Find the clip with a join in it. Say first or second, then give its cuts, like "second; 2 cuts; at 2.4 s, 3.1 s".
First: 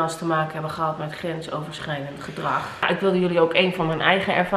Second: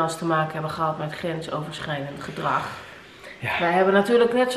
first; 1 cut; at 2.9 s